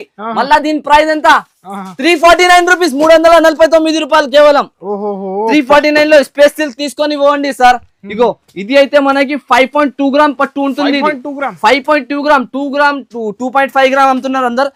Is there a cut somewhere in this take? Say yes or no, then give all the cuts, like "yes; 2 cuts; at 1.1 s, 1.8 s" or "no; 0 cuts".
no; 0 cuts